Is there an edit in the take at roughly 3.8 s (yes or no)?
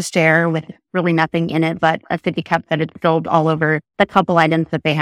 yes